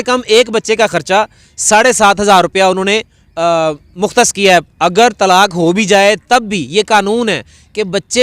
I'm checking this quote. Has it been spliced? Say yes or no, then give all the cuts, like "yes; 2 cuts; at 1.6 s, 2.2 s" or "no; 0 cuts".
yes; 1 cut; at 4.7 s